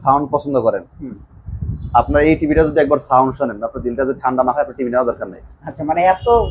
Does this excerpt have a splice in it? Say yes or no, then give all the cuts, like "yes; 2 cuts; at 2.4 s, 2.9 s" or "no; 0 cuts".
no; 0 cuts